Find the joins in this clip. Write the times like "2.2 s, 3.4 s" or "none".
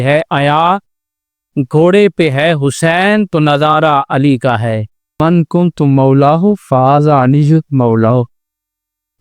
5.2 s